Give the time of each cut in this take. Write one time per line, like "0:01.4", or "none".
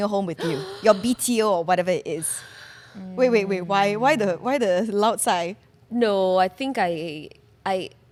none